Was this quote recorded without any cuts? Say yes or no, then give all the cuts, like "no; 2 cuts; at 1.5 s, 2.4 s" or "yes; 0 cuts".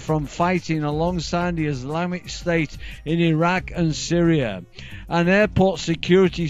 yes; 0 cuts